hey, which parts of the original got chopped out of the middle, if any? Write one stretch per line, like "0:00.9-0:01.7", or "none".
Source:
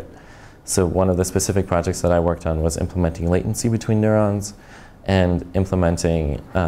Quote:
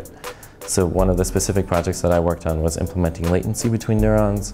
none